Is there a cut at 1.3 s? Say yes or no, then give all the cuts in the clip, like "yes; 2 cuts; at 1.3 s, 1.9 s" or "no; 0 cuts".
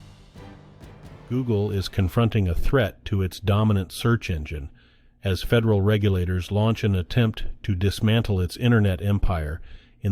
yes; 1 cut; at 1.3 s